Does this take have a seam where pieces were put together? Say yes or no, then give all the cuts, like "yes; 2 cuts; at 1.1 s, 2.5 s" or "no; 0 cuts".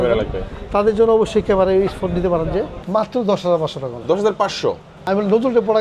yes; 2 cuts; at 2.8 s, 4.9 s